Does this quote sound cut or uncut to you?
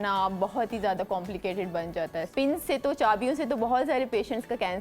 cut